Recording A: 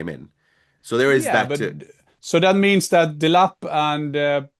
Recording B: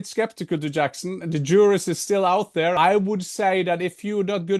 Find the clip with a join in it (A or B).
B